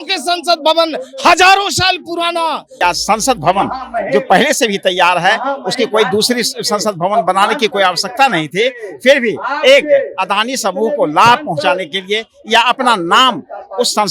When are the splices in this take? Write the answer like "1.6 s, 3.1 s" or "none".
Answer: 2.8 s